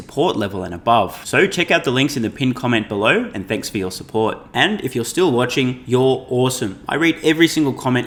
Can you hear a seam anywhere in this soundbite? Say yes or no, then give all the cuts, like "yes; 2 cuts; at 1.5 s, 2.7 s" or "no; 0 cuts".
no; 0 cuts